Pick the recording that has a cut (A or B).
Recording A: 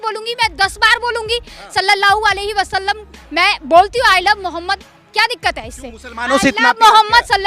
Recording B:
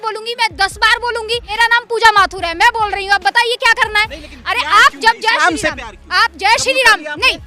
B